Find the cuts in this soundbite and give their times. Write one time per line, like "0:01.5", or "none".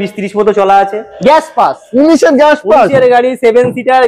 0:01.1

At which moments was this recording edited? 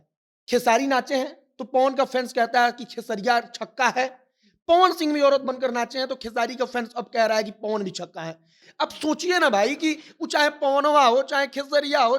0:08.5

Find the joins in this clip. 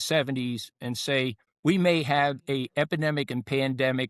0:01.5

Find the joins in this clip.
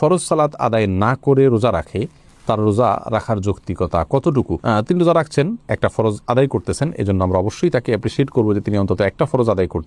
none

